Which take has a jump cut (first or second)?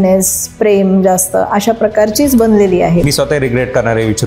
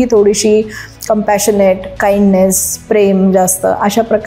first